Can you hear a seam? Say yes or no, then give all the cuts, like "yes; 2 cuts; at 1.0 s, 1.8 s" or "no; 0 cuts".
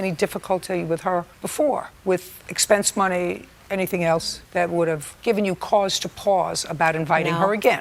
no; 0 cuts